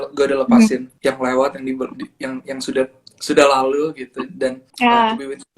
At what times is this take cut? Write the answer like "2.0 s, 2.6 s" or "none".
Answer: 0.9 s, 4.6 s